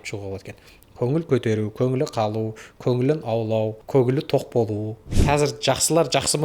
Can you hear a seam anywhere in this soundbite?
yes; 2 cuts; at 3.8 s, 5.1 s

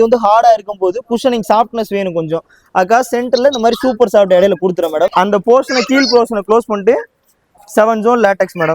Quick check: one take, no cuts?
no; 1 cut; at 5.1 s

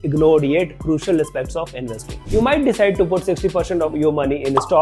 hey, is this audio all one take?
no; 2 cuts; at 2.2 s, 3.9 s

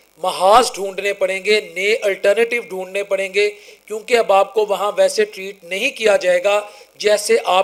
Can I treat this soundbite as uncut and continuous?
yes; 0 cuts

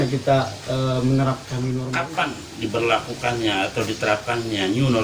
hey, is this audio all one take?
no; 1 cut; at 1.9 s

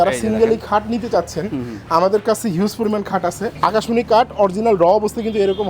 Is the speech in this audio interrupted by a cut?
yes; 1 cut; at 3.6 s

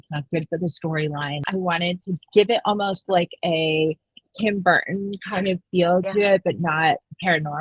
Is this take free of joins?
no; 1 cut; at 1.4 s

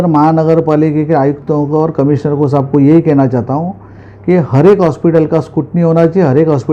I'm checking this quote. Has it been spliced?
no; 0 cuts

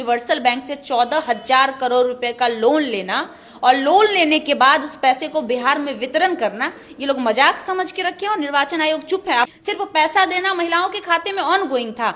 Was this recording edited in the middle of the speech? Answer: yes; 1 cut; at 9.6 s

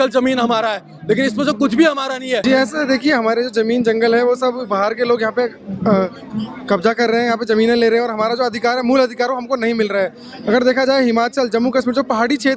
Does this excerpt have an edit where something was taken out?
yes; 1 cut; at 2.4 s

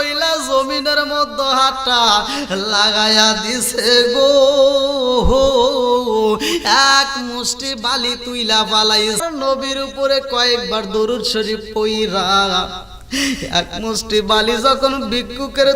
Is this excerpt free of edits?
no; 1 cut; at 9.2 s

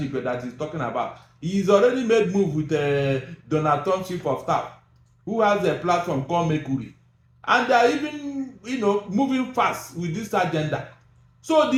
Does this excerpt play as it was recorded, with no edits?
yes; 0 cuts

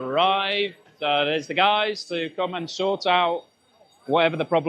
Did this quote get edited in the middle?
no; 0 cuts

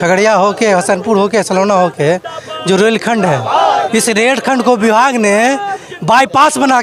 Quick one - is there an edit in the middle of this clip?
no; 0 cuts

